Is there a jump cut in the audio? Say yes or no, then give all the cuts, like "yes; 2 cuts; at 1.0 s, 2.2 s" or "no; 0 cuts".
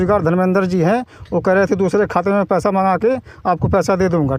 no; 0 cuts